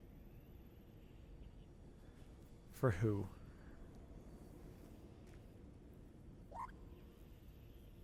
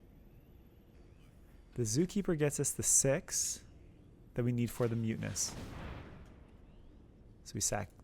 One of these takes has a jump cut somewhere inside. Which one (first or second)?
second